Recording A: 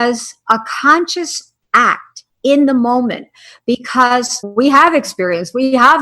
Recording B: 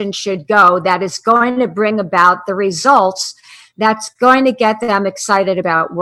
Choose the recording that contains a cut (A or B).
A